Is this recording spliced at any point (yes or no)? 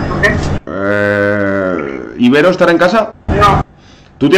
yes